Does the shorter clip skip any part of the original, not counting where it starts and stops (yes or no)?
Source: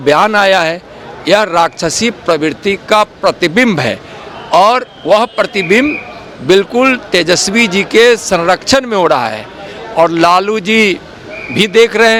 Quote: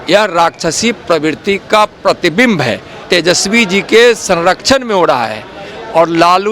yes